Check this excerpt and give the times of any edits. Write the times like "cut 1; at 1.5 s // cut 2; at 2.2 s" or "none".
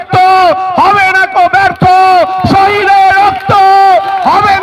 none

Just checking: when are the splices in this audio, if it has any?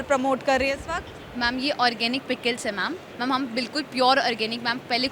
cut 1; at 3.1 s

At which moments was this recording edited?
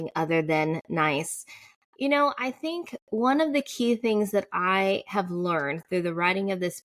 none

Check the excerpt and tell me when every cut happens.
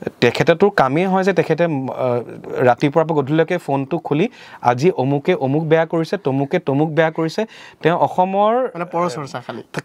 none

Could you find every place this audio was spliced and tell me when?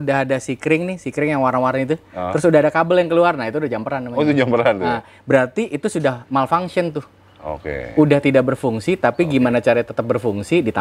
none

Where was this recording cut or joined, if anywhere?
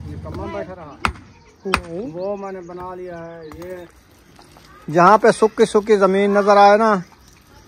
cut 1; at 4.0 s

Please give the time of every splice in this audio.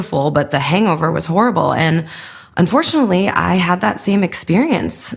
none

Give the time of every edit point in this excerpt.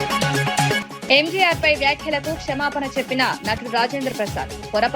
none

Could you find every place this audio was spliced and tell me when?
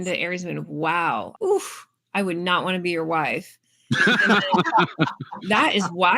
cut 1; at 1.3 s

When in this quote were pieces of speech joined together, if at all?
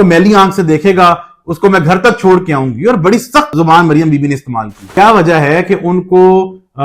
cut 1; at 3.5 s // cut 2; at 4.8 s

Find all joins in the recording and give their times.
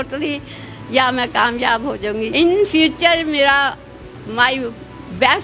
cut 1; at 2.3 s

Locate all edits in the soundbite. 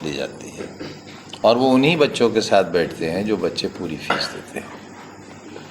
none

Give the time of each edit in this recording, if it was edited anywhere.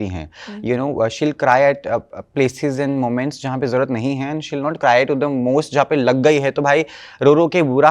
none

